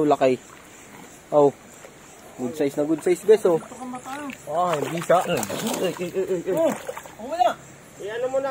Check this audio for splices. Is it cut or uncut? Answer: uncut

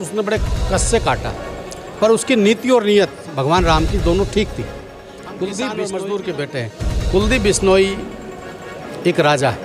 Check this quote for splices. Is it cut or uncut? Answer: cut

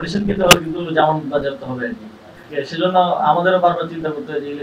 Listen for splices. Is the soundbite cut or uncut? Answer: cut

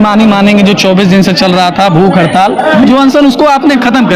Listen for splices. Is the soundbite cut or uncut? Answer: uncut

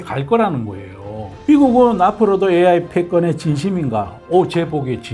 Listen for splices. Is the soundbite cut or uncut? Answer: cut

